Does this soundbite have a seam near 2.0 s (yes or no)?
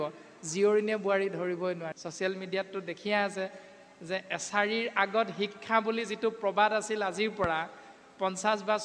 yes